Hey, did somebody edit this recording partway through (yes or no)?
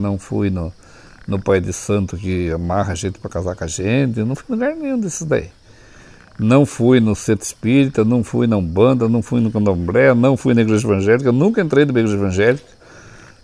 no